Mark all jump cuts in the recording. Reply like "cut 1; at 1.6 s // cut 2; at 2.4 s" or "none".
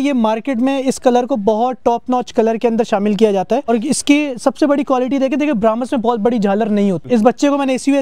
cut 1; at 3.7 s // cut 2; at 7.1 s

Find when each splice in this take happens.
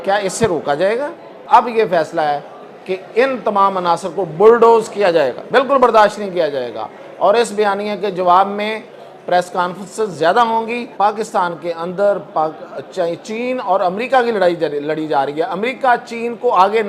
cut 1; at 1.4 s // cut 2; at 5.4 s // cut 3; at 10.9 s

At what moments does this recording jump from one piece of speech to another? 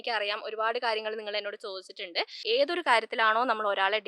cut 1; at 2.4 s

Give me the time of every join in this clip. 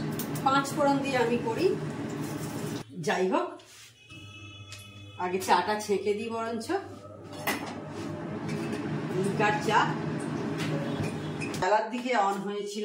cut 1; at 2.8 s // cut 2; at 11.6 s

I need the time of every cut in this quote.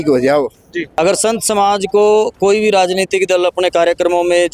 cut 1; at 0.9 s

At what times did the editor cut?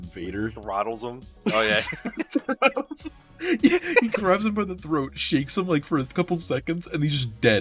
none

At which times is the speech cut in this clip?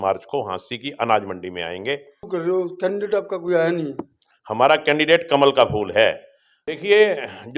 cut 1; at 2.2 s // cut 2; at 6.6 s

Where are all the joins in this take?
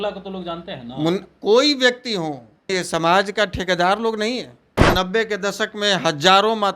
cut 1; at 2.7 s // cut 2; at 4.8 s

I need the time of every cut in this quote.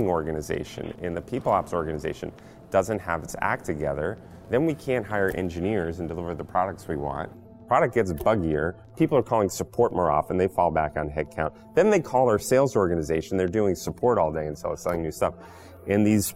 none

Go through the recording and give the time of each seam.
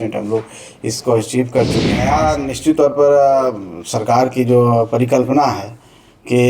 cut 1; at 2.0 s

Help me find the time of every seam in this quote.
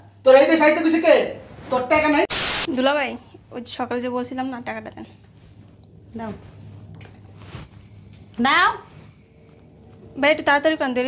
cut 1; at 2.5 s

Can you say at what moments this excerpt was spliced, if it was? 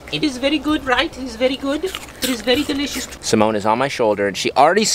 cut 1; at 3.0 s

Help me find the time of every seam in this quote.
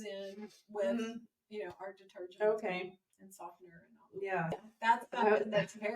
cut 1; at 4.7 s

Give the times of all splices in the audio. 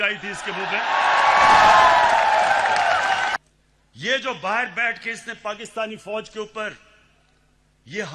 cut 1; at 3.3 s

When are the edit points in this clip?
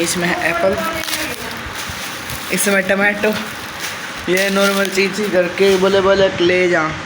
none

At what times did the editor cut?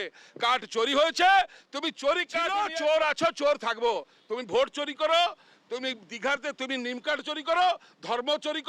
cut 1; at 2.6 s

